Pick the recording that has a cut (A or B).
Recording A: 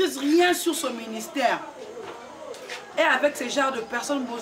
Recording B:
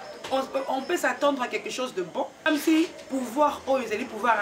B